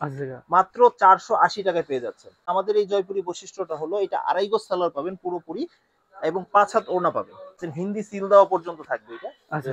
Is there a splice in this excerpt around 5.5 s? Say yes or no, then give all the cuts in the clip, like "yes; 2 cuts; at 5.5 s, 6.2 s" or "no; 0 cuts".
no; 2 cuts; at 2.4 s, 7.7 s